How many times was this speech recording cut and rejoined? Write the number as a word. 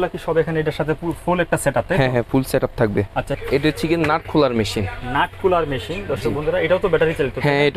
one